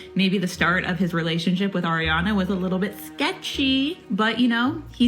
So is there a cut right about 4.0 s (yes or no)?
yes